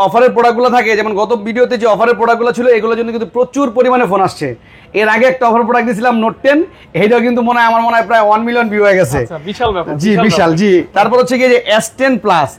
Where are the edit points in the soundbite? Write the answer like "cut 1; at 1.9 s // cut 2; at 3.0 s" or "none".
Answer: none